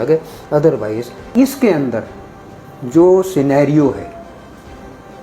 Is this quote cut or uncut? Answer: cut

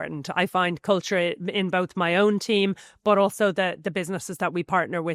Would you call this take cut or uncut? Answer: uncut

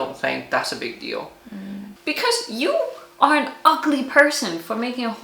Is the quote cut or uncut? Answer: cut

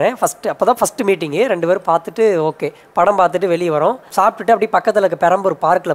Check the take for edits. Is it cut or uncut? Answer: cut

